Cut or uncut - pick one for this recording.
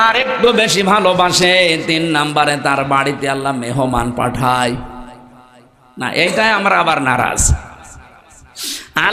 uncut